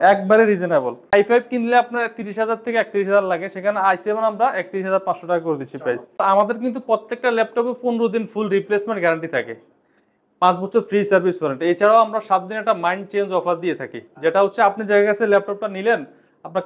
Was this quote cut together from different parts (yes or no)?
yes